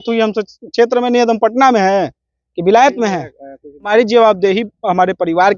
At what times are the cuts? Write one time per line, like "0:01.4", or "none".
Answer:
0:03.9